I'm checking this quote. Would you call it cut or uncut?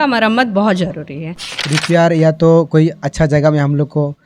cut